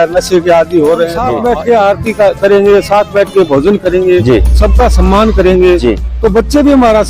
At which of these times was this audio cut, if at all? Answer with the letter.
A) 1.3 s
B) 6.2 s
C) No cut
A